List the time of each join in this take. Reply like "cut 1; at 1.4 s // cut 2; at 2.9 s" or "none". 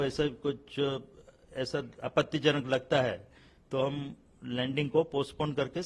none